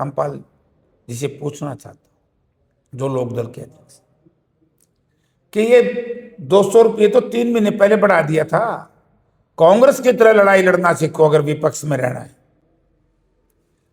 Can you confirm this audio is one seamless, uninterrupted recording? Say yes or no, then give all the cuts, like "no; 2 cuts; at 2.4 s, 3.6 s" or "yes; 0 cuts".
yes; 0 cuts